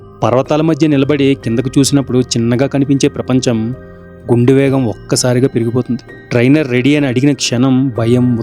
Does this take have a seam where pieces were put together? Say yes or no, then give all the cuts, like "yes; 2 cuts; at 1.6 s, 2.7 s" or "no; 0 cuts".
no; 0 cuts